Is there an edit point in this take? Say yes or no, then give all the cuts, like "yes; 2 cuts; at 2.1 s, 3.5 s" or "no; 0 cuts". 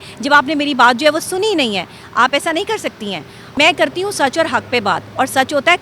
yes; 1 cut; at 3.4 s